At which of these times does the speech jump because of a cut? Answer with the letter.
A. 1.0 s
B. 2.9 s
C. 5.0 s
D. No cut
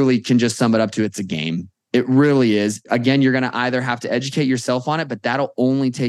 B